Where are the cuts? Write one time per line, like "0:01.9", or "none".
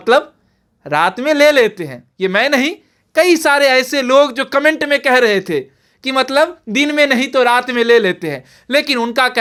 none

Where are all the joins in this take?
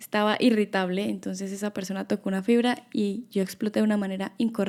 none

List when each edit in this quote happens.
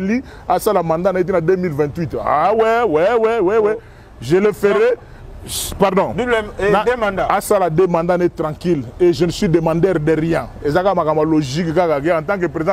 none

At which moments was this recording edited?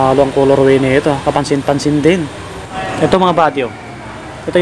0:02.3

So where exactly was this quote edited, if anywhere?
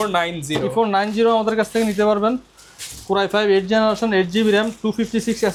none

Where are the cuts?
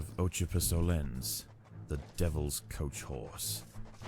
none

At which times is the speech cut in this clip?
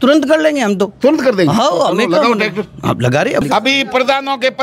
0:03.4

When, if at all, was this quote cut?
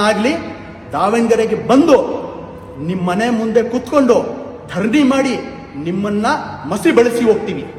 none

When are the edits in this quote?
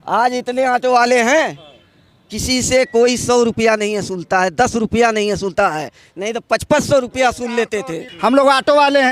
0:08.1

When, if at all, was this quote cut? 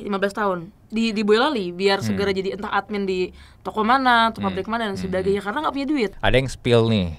0:06.2

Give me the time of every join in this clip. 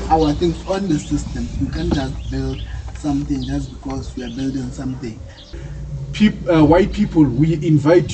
0:05.5

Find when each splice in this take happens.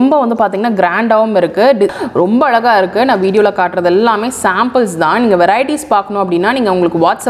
0:01.9

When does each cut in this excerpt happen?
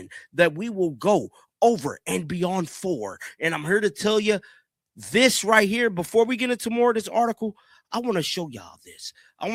none

